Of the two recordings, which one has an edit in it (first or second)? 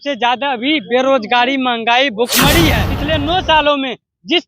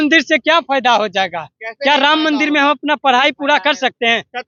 first